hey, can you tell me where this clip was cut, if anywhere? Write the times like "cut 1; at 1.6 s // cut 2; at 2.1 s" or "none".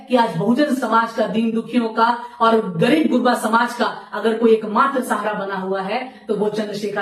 none